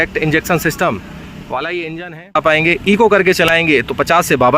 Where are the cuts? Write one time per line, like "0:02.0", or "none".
0:02.4